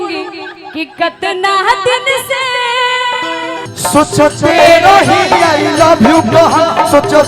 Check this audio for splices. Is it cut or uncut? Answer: cut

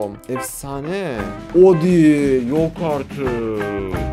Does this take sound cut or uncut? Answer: cut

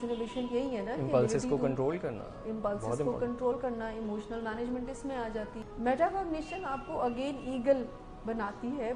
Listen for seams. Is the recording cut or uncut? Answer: cut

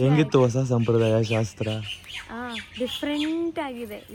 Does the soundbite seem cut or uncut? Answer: uncut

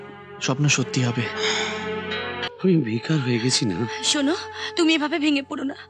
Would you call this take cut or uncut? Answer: cut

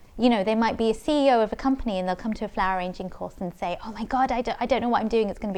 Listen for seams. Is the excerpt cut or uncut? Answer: uncut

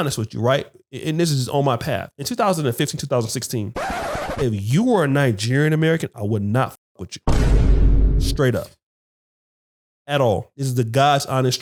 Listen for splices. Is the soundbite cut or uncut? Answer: uncut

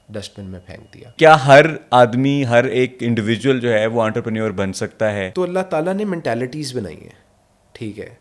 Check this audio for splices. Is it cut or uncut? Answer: cut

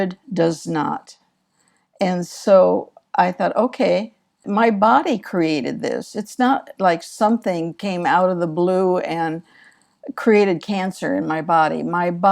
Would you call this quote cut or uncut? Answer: cut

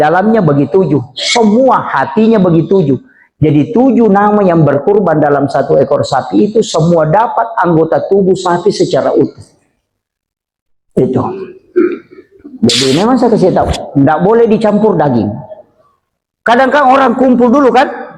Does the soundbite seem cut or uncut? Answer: uncut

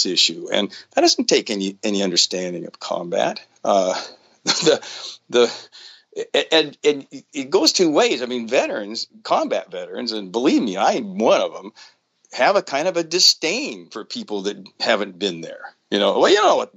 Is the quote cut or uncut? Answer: uncut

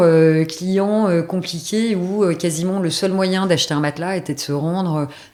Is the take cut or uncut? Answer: uncut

